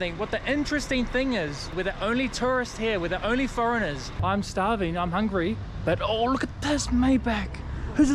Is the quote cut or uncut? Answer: cut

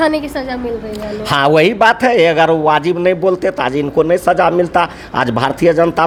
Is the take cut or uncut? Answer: uncut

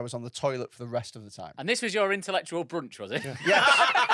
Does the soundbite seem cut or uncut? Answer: cut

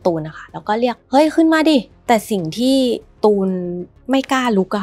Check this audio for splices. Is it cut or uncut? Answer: cut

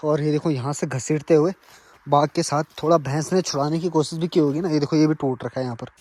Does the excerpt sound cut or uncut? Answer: uncut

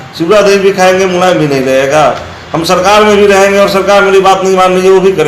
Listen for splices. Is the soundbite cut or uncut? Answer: uncut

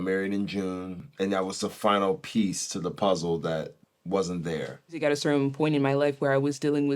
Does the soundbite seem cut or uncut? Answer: cut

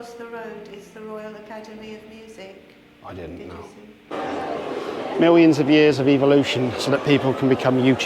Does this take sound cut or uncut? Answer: cut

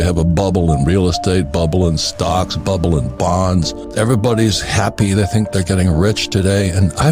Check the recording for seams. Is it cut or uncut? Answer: cut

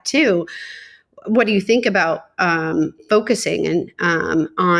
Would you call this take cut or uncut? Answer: uncut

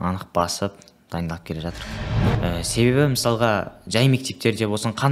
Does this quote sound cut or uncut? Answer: cut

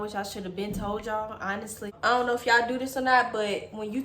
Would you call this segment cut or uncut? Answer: cut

